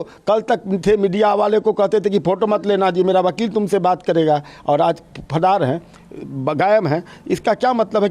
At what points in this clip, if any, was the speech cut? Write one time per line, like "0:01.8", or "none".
none